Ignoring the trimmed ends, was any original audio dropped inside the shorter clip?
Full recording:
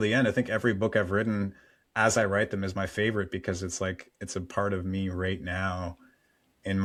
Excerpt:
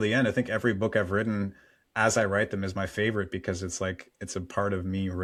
no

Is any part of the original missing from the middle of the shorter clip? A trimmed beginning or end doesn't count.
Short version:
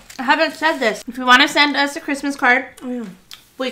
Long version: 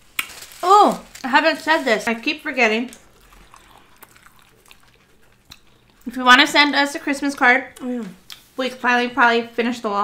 yes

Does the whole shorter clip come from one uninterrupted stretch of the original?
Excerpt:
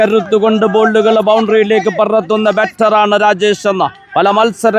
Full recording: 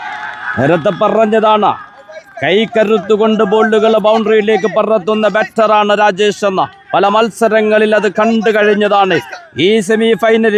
yes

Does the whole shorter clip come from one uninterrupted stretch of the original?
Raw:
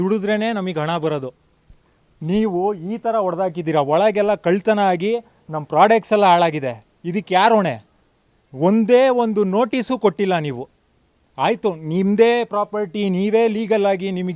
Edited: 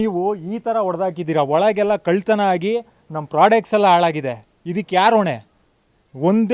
yes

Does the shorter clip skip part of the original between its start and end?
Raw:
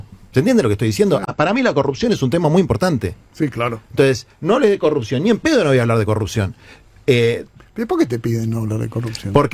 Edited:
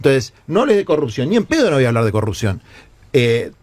no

